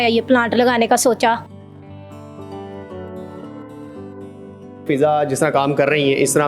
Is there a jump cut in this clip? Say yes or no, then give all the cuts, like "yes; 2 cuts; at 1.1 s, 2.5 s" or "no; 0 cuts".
yes; 1 cut; at 4.8 s